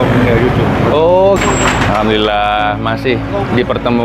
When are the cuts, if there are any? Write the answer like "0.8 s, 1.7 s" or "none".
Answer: 1.4 s